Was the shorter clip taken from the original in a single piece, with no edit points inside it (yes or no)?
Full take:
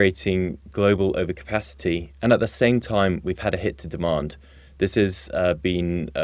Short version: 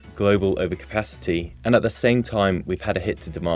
yes